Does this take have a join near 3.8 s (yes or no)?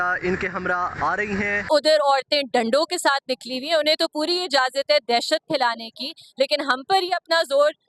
no